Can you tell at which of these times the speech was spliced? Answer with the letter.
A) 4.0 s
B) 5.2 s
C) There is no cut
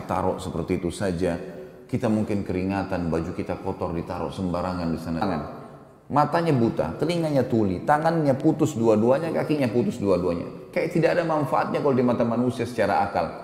B